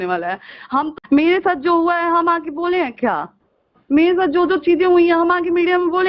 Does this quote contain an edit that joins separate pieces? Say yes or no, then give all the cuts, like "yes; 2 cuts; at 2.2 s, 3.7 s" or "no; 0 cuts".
yes; 1 cut; at 1.0 s